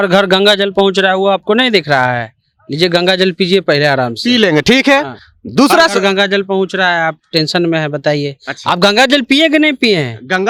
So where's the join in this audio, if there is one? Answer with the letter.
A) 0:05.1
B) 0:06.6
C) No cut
C